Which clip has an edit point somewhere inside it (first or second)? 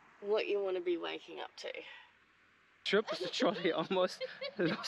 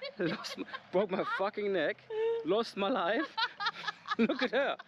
first